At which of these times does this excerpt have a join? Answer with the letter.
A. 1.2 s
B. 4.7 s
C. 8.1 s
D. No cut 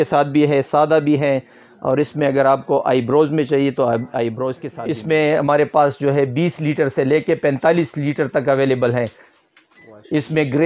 B